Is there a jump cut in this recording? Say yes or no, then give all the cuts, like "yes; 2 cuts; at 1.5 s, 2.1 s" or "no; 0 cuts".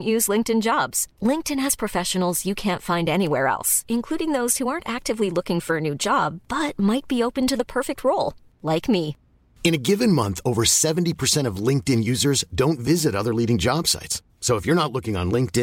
no; 0 cuts